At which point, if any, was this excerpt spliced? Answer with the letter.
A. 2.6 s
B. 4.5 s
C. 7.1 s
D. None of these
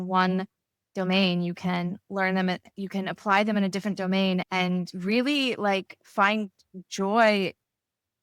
B